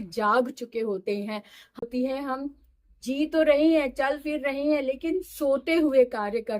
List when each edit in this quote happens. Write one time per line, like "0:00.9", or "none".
0:01.8